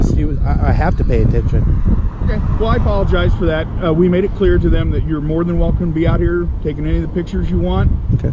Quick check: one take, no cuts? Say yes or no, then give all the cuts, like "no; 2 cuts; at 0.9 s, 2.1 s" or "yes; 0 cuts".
yes; 0 cuts